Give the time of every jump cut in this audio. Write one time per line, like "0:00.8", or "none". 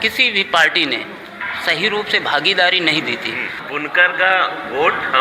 0:03.6